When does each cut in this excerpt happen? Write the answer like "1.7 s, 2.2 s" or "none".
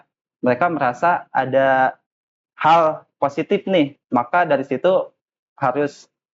none